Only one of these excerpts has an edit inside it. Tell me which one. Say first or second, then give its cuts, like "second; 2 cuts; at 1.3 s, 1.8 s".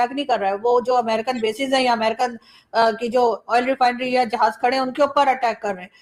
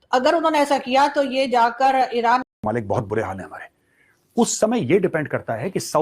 second; 1 cut; at 2.4 s